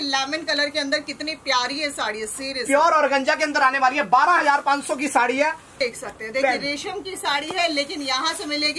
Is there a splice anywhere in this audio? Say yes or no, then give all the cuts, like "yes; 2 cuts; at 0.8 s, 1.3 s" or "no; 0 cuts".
yes; 1 cut; at 5.7 s